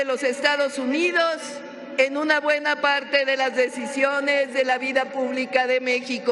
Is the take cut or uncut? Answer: uncut